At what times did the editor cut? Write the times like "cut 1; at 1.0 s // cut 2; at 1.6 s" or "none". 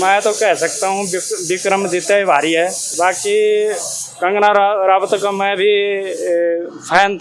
cut 1; at 2.8 s